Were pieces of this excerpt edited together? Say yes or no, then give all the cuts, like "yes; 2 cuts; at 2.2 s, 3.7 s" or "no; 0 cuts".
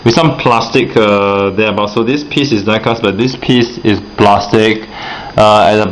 yes; 1 cut; at 2.8 s